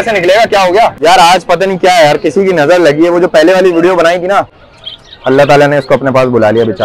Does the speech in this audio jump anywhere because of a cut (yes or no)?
yes